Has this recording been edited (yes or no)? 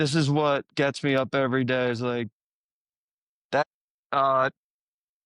yes